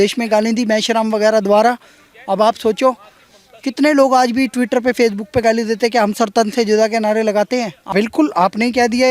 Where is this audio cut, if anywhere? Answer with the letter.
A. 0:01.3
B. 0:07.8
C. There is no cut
B